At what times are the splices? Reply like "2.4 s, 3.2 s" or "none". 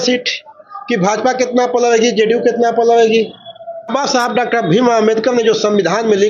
3.8 s